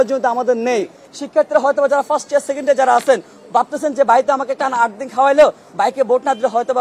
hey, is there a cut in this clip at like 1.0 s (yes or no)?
yes